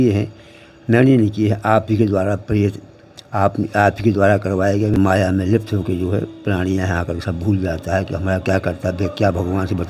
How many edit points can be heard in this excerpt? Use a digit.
1